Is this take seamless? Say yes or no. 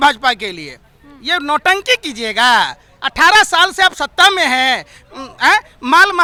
yes